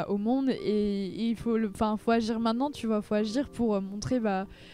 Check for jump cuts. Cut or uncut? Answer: uncut